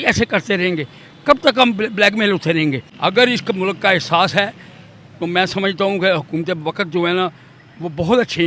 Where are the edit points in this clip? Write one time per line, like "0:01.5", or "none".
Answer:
0:02.9